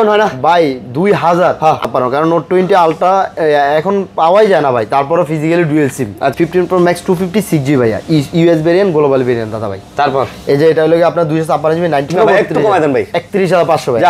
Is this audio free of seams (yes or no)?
no